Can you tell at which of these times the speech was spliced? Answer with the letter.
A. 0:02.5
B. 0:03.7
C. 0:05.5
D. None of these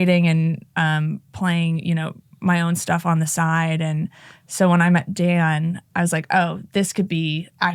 D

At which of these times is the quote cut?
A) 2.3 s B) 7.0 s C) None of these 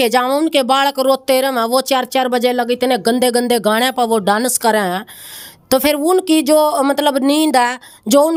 C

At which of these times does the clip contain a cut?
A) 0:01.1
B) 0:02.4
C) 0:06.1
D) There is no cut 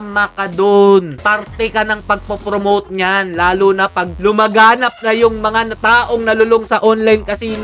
A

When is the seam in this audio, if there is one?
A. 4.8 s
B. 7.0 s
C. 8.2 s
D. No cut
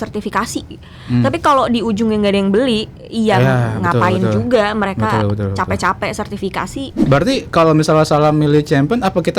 B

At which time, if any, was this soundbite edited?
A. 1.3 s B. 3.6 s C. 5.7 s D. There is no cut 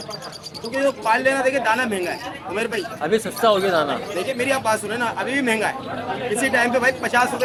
D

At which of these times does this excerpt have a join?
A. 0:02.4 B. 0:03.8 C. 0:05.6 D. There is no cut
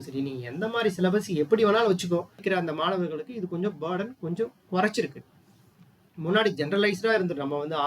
A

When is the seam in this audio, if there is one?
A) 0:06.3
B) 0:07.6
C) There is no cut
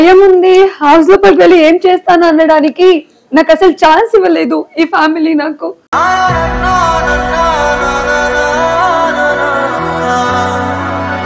C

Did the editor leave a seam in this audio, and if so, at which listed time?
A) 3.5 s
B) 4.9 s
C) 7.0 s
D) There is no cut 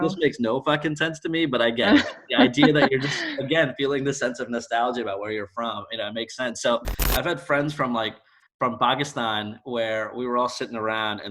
C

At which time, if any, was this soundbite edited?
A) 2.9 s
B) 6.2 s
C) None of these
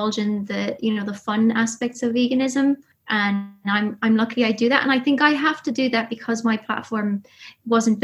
A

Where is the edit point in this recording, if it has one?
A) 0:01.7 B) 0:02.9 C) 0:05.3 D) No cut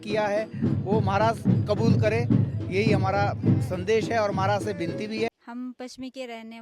C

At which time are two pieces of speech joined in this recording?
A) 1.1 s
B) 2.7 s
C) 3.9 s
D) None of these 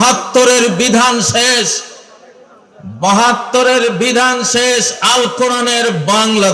D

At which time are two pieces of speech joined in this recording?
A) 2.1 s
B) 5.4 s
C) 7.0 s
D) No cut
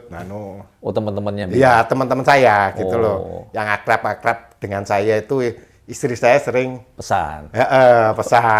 D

